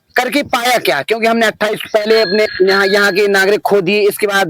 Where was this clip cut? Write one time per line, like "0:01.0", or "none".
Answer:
0:02.5